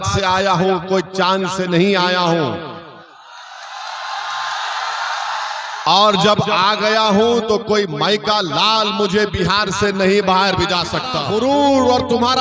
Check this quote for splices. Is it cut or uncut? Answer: cut